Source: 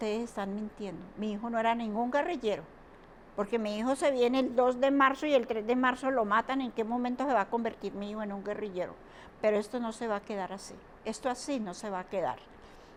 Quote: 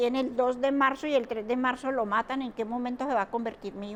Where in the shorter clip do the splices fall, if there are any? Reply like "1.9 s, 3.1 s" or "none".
none